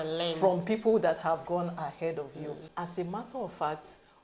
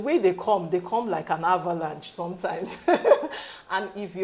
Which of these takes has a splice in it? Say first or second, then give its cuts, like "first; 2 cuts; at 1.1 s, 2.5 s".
first; 1 cut; at 2.7 s